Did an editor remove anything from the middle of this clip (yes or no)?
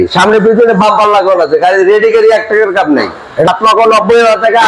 yes